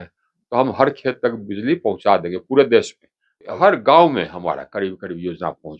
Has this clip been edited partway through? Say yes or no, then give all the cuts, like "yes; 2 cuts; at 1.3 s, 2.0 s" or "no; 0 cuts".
yes; 1 cut; at 3.5 s